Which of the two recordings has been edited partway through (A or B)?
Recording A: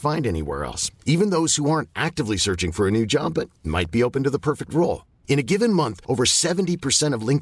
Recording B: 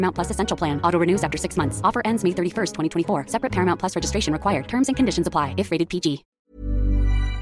B